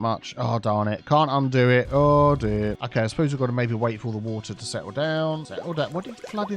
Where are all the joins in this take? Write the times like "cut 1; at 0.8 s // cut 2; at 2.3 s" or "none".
cut 1; at 2.8 s // cut 2; at 5.5 s